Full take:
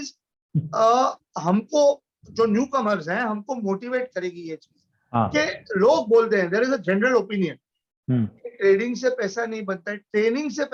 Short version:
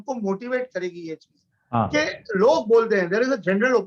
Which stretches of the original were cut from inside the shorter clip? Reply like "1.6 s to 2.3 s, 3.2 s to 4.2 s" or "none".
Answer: none